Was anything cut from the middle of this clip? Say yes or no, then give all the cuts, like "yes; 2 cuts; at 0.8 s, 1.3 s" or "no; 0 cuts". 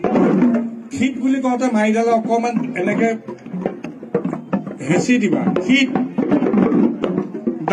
no; 0 cuts